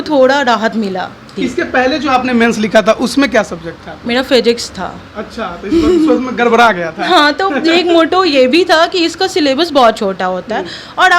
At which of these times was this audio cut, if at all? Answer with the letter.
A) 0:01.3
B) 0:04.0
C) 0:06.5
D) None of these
A